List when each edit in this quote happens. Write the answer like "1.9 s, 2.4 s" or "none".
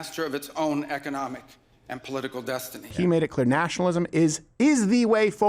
2.9 s